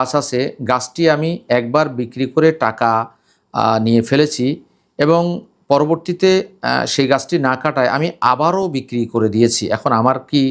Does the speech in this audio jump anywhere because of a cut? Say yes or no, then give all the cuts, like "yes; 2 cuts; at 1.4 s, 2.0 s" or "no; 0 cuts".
no; 0 cuts